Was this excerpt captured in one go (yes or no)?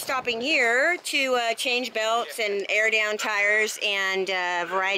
yes